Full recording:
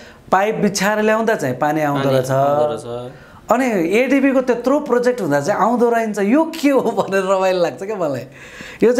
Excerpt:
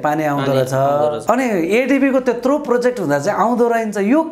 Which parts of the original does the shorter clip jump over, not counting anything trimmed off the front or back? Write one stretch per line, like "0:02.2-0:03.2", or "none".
0:02.8-0:03.4